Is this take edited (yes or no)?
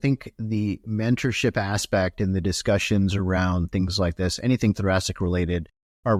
no